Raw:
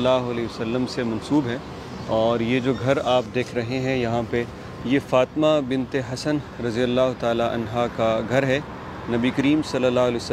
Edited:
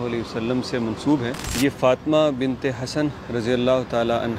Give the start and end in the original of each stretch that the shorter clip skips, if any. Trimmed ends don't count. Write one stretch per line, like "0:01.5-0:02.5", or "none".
0:01.7-0:04.7